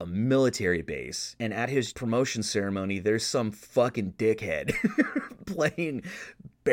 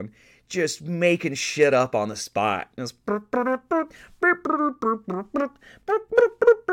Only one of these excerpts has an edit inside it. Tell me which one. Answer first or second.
first